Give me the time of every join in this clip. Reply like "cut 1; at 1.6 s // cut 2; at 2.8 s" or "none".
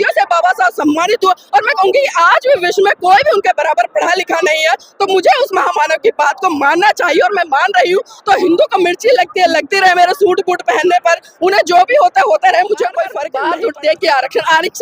cut 1; at 13.3 s